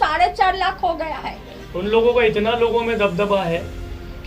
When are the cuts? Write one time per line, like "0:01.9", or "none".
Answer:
0:01.7